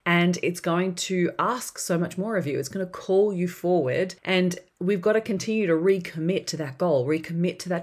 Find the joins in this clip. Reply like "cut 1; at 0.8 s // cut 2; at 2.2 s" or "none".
cut 1; at 4.2 s